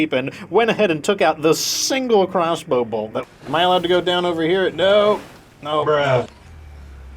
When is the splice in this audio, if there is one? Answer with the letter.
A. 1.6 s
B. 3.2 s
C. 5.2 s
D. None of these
B